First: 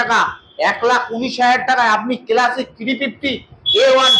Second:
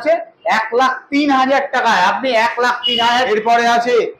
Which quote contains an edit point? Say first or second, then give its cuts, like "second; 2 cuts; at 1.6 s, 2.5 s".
second; 1 cut; at 3.3 s